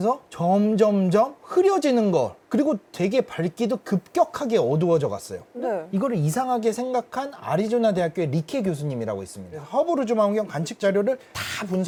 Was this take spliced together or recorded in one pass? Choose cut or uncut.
uncut